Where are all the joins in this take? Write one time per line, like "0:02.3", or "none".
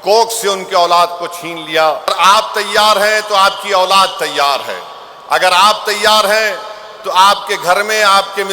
0:02.1